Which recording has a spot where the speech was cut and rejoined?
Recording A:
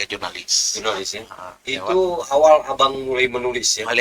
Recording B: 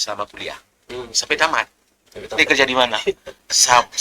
B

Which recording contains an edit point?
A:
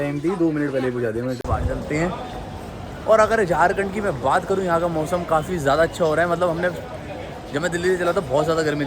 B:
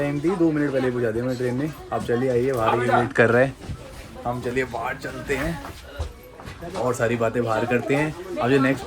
A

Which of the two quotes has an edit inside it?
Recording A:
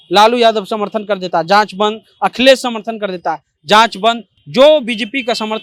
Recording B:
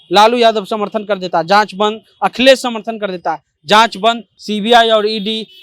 B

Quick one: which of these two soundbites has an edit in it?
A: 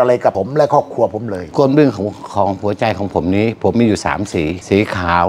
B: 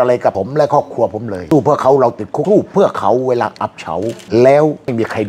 A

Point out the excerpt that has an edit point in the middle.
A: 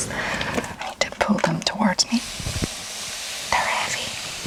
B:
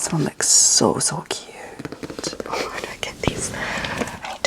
B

